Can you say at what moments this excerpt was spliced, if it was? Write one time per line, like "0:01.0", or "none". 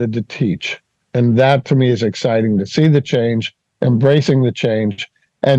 0:01.0